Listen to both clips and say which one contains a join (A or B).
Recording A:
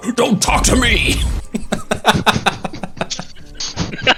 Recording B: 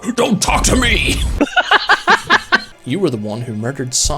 B